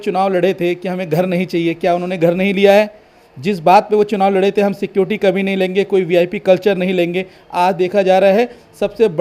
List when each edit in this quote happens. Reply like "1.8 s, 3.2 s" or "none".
none